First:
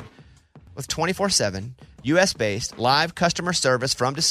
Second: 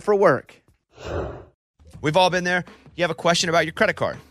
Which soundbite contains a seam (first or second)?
second